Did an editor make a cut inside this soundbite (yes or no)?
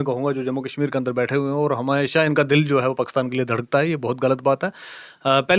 no